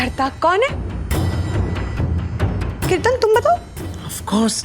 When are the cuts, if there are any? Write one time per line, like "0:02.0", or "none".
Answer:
0:02.9

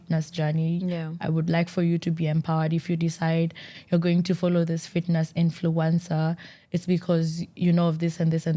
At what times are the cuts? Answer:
none

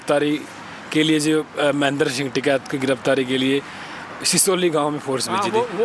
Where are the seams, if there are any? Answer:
none

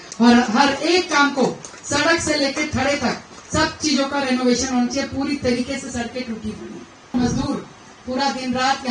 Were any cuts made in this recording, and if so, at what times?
0:07.1

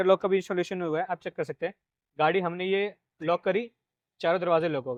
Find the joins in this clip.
none

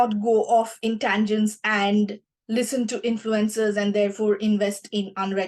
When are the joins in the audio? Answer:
none

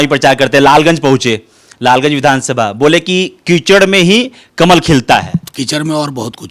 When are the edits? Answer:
0:05.5

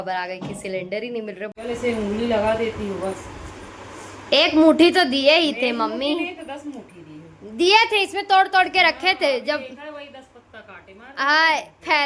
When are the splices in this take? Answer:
0:01.5

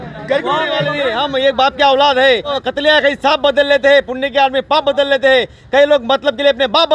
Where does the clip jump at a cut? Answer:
0:00.9
0:02.6

